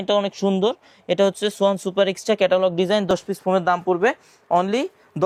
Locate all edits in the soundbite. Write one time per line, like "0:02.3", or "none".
none

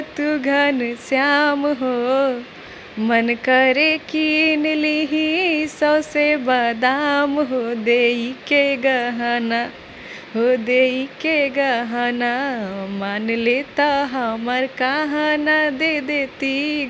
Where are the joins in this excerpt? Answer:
none

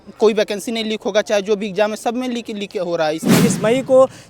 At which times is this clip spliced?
0:03.4

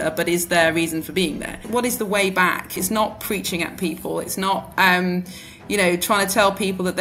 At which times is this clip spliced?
0:01.6
0:02.8

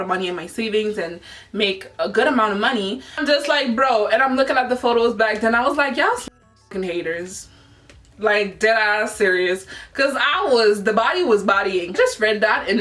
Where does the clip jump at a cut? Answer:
0:03.1
0:11.9

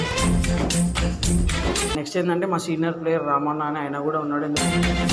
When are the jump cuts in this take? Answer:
0:02.0

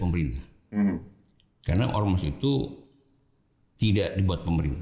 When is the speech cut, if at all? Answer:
none

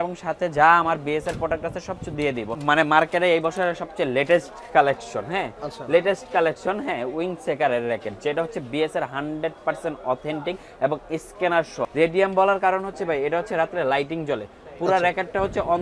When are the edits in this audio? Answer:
0:02.6
0:11.9

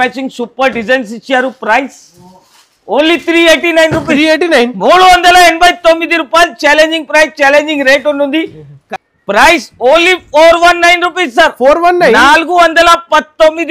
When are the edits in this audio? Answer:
0:08.8

